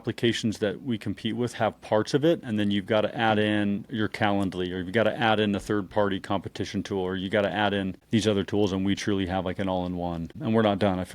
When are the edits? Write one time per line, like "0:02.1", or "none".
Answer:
0:08.0
0:10.3